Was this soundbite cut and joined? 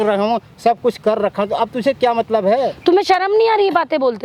no; 0 cuts

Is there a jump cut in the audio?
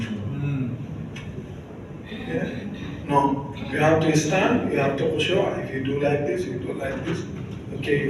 no; 0 cuts

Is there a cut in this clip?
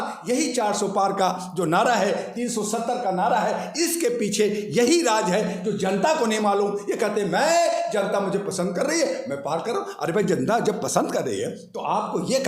no; 0 cuts

